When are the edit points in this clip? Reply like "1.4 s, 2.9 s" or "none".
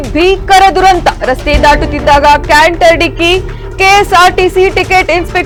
none

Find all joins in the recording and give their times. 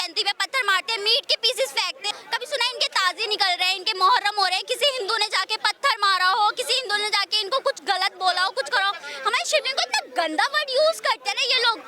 2.2 s, 9.1 s

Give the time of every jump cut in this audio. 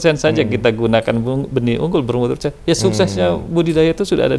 none

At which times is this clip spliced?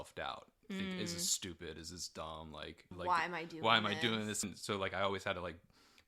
2.9 s, 4.5 s

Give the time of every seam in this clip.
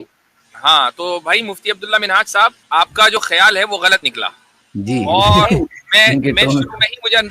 2.6 s

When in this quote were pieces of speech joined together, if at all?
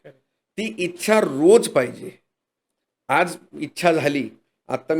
none

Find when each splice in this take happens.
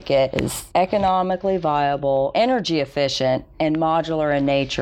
2.3 s

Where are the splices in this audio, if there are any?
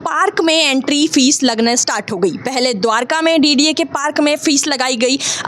none

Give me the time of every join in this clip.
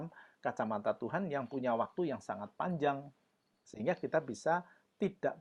none

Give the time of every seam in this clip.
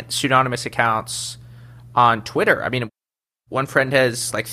2.9 s

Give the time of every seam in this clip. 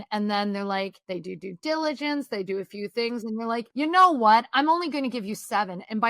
1.0 s, 3.7 s

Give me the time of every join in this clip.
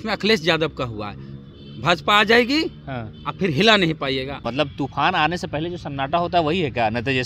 4.4 s

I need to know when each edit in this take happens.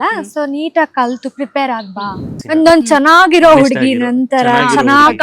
2.3 s

